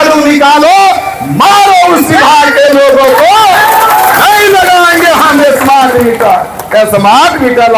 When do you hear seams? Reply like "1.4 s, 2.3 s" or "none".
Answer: none